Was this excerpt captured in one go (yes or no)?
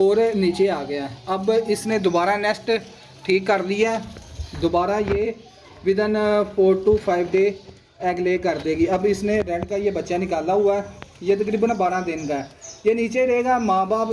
yes